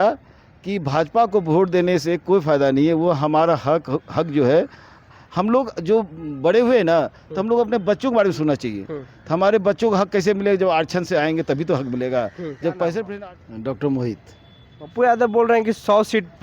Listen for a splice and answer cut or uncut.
cut